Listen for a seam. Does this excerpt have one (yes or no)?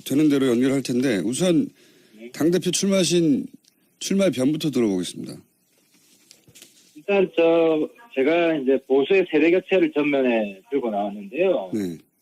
yes